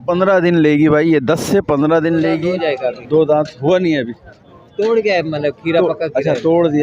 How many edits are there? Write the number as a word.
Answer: one